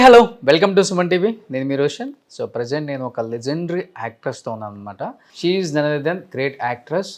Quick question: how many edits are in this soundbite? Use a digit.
1